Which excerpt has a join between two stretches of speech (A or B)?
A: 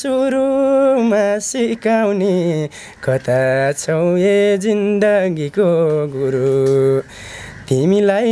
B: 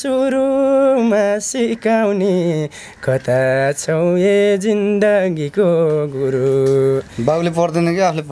B